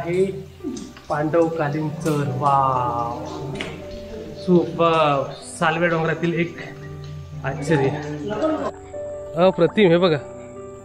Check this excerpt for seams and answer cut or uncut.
cut